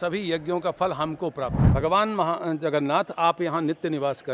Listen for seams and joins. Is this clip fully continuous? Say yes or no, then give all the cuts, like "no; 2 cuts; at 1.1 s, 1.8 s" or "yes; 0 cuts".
no; 1 cut; at 1.6 s